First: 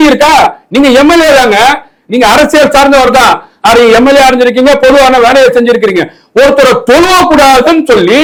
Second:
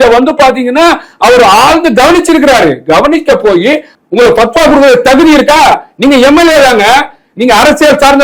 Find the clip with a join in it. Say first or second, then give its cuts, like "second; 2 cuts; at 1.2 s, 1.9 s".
second; 1 cut; at 3.9 s